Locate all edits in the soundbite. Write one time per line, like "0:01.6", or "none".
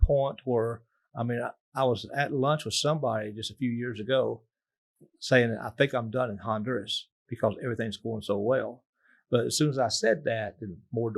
none